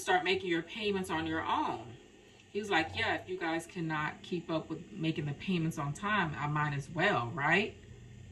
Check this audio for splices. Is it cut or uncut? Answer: uncut